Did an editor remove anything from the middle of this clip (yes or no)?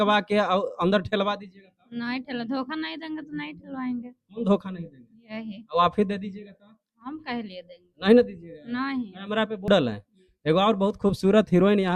yes